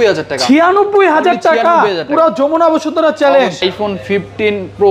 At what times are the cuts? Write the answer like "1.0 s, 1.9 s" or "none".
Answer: 3.6 s